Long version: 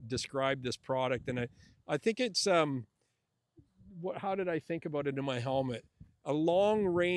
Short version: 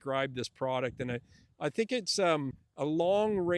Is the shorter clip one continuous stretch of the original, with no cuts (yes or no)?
no